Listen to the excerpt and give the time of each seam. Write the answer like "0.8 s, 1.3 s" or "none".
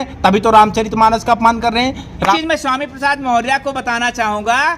2.3 s